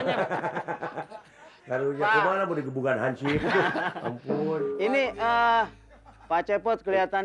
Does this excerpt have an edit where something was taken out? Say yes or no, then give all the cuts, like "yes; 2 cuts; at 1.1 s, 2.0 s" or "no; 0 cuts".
no; 0 cuts